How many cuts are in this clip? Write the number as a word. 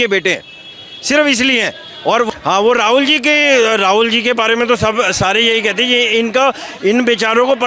one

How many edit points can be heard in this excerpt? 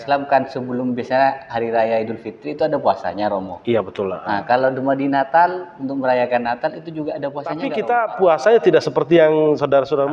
one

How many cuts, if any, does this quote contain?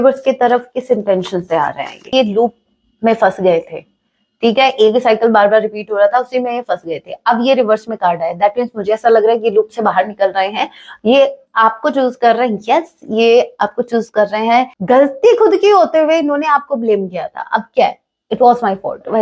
two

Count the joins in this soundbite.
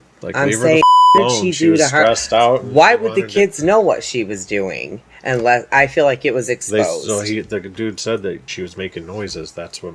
one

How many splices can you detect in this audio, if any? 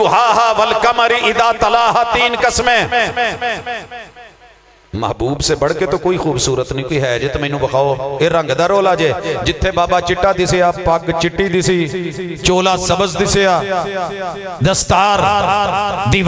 zero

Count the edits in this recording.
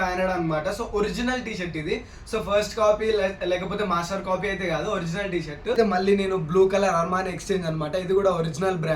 one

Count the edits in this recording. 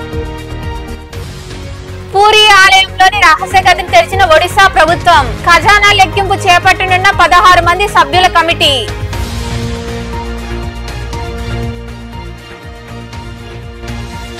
zero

